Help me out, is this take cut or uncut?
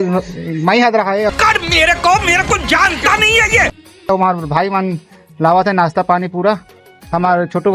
uncut